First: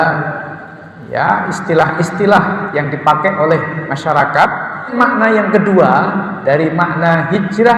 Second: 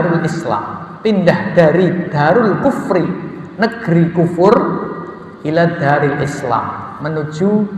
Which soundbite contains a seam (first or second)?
first